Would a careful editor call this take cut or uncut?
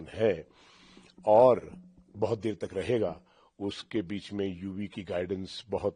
uncut